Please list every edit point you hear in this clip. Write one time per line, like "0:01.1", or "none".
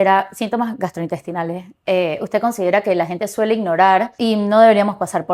0:04.1